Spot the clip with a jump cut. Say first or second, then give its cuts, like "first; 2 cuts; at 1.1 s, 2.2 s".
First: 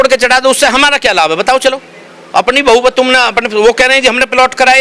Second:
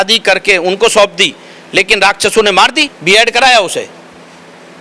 second; 1 cut; at 2.9 s